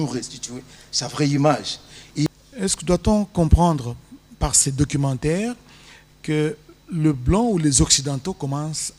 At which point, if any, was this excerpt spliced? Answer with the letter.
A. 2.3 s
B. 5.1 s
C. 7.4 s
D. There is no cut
A